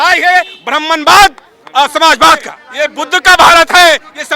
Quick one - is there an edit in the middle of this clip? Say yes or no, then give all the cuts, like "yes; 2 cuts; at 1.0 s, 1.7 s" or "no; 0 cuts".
yes; 1 cut; at 2.6 s